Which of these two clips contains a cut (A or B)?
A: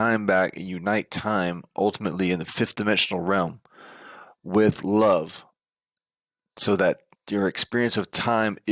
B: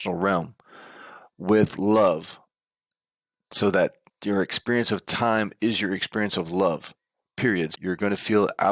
B